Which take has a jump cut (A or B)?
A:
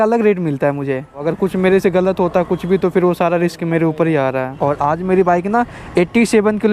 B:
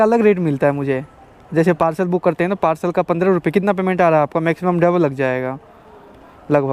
A